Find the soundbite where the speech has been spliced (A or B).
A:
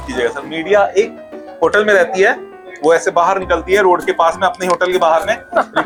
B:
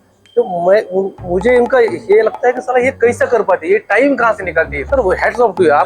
B